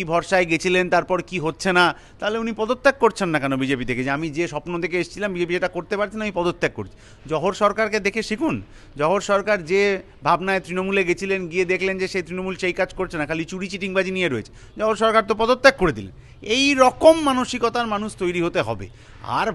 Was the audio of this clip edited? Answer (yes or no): no